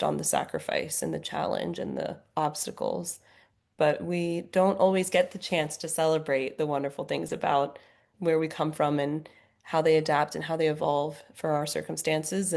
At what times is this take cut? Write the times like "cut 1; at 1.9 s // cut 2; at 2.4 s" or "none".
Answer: none